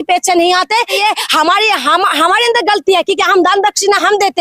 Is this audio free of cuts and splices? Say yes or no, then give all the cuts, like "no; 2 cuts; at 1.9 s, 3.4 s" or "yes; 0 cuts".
no; 1 cut; at 0.9 s